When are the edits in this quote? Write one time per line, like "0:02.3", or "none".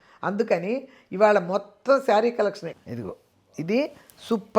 0:02.7